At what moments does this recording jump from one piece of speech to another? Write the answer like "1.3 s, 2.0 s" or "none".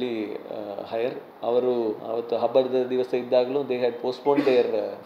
none

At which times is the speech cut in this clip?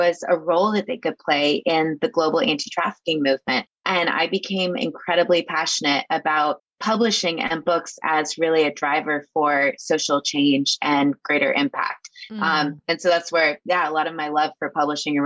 6.7 s

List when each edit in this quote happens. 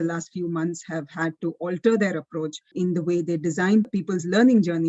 2.7 s, 3.9 s

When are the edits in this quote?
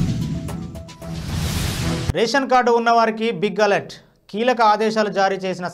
2.1 s

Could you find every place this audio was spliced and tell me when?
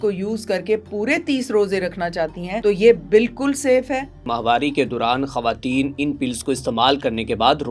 2.5 s, 4.3 s

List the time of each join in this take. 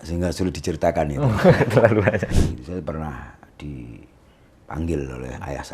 2.3 s

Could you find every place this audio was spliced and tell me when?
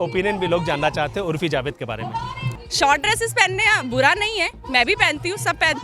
2.5 s

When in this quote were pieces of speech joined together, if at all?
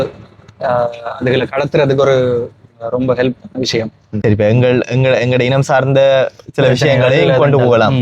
none

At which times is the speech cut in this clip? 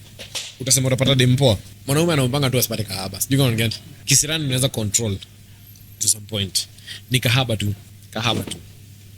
1.7 s, 3.9 s, 7.9 s

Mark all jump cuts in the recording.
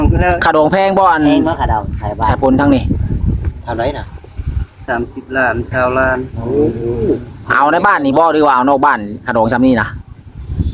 4.9 s

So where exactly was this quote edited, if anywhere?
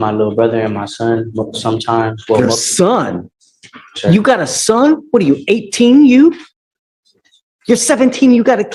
none

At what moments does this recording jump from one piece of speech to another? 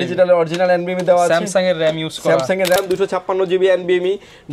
2.8 s

